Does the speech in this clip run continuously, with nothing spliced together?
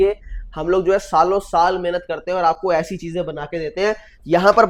yes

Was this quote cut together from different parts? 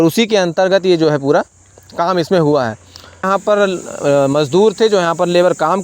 yes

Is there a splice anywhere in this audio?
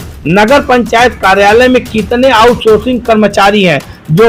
no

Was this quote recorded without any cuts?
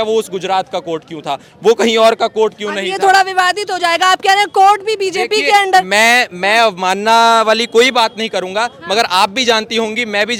yes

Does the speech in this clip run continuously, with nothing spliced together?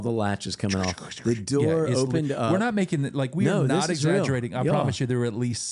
yes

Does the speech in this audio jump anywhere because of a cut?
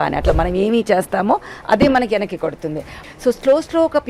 yes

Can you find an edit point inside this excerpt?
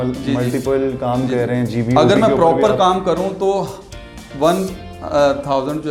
no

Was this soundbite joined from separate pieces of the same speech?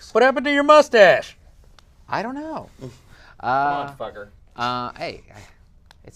yes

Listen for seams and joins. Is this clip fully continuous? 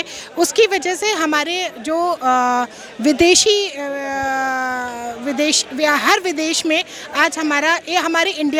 yes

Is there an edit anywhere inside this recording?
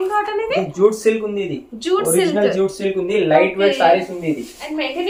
no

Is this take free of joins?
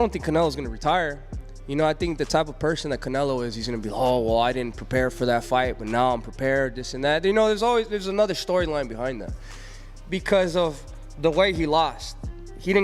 no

